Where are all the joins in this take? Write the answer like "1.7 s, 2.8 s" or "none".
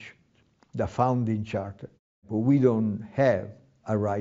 2.3 s